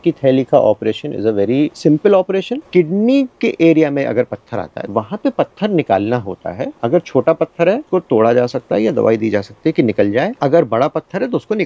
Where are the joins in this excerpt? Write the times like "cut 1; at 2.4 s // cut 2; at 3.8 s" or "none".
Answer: cut 1; at 1.7 s // cut 2; at 2.6 s // cut 3; at 4.8 s // cut 4; at 6.7 s // cut 5; at 7.8 s // cut 6; at 10.3 s